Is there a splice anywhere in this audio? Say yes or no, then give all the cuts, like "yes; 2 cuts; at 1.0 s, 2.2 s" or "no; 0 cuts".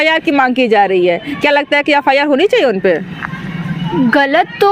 no; 0 cuts